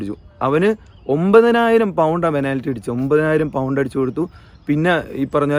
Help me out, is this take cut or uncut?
uncut